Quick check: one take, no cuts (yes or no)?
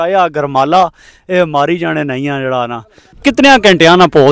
no